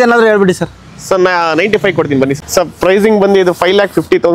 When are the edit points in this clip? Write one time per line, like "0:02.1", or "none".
0:02.4

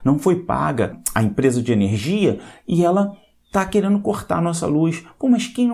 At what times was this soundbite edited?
0:01.0

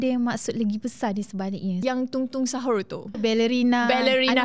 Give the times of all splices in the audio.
0:01.8
0:03.2

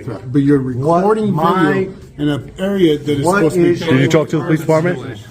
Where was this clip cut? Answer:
none

